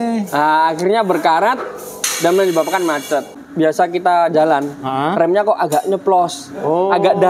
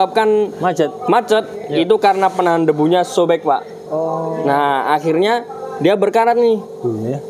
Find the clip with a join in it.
first; 1 cut; at 3.4 s

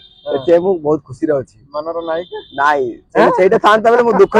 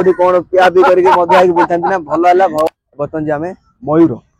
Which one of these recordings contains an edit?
second; 1 cut; at 2.7 s

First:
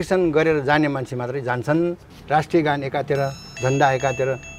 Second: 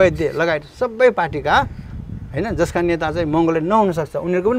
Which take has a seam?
first; 1 cut; at 2.2 s

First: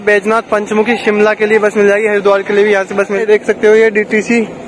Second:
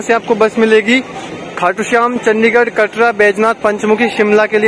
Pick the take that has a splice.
first; 1 cut; at 3.2 s

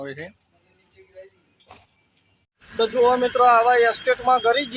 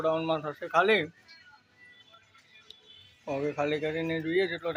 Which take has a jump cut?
first; 1 cut; at 2.5 s

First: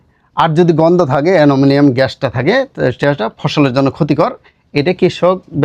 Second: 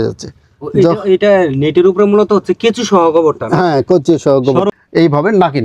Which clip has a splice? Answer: second; 1 cut; at 4.7 s

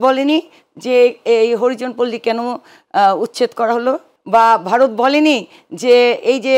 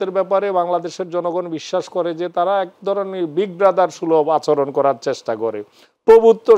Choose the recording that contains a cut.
first; 1 cut; at 4.1 s

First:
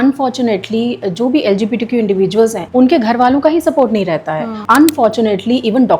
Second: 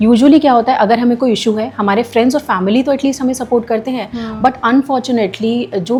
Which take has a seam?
first; 2 cuts; at 2.6 s, 4.6 s

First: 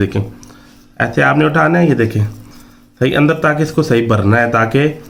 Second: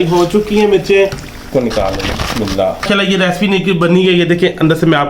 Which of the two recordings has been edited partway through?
second; 2 cuts; at 1.5 s, 2.8 s

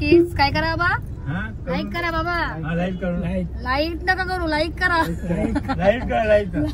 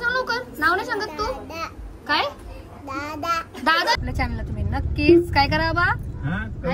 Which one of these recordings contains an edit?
second; 1 cut; at 4.0 s

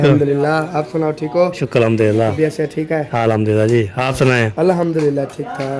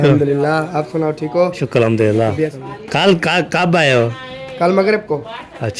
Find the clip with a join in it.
second; 1 cut; at 2.5 s

